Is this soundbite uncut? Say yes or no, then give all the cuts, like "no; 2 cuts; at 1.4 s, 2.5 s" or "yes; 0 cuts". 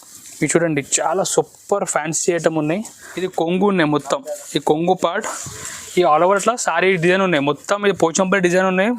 no; 1 cut; at 3.0 s